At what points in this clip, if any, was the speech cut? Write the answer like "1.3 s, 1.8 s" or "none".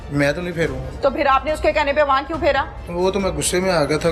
none